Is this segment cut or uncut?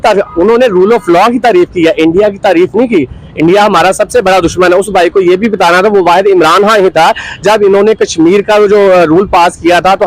uncut